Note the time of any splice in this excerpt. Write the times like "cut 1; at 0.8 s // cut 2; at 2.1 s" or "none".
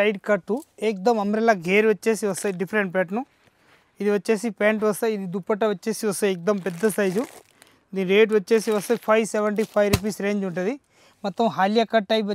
none